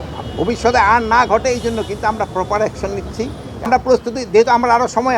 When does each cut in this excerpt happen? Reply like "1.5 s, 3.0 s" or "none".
3.7 s